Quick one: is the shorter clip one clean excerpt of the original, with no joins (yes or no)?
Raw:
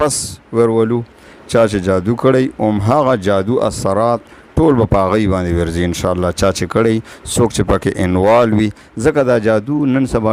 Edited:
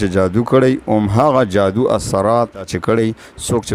no